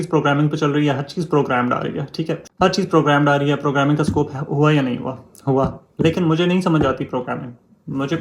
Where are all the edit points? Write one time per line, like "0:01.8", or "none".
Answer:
0:02.4